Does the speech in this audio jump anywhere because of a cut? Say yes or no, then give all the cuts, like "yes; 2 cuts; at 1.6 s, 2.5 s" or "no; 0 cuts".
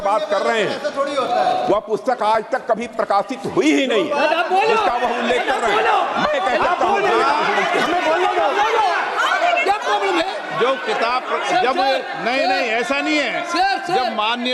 no; 0 cuts